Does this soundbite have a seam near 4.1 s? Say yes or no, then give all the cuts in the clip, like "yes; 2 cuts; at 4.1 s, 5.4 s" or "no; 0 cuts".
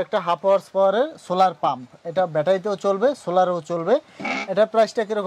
no; 0 cuts